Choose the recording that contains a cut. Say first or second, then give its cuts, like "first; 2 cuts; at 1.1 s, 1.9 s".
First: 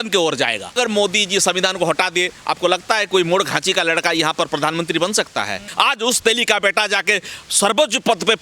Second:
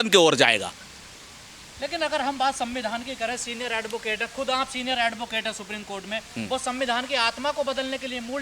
first; 2 cuts; at 0.7 s, 5.6 s